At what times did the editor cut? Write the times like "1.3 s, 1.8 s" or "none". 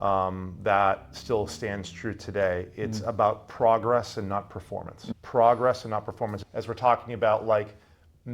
5.0 s, 6.4 s